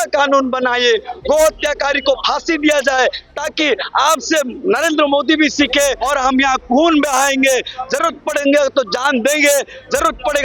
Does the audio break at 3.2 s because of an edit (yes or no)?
no